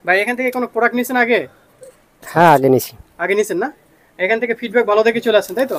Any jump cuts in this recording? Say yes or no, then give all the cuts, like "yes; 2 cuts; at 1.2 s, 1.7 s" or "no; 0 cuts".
no; 0 cuts